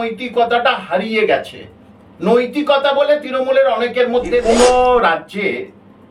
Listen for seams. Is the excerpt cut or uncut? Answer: cut